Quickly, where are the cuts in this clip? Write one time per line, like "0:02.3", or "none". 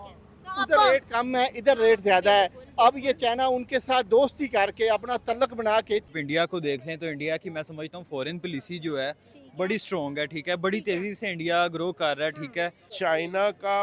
0:06.1
0:12.9